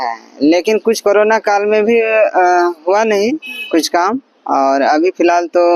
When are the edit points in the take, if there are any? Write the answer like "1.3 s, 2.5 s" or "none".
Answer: none